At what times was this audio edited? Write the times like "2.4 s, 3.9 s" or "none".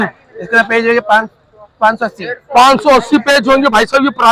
none